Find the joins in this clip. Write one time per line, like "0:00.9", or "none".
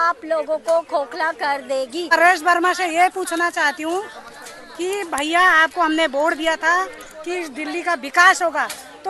0:02.1